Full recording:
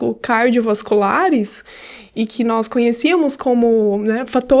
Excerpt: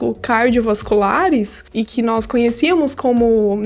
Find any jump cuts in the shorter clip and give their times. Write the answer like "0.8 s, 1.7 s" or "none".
1.6 s